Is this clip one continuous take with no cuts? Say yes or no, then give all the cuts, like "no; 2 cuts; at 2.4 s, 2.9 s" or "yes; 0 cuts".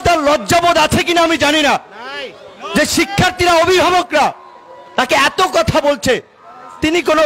yes; 0 cuts